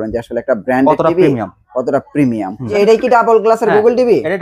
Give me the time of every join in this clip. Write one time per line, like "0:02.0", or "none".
0:02.7